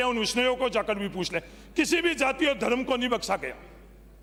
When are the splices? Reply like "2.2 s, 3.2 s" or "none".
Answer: none